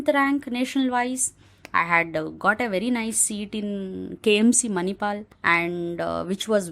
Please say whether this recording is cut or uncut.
cut